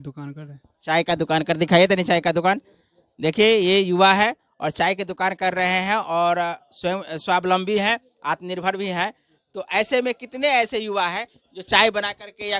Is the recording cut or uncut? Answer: uncut